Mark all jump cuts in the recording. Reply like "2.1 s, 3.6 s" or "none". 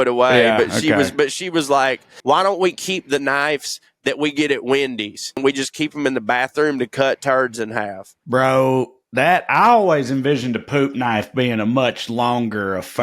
2.1 s, 5.4 s